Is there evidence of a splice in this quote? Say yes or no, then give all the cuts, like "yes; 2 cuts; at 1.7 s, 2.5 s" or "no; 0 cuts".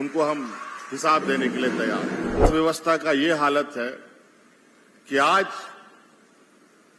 yes; 1 cut; at 2.4 s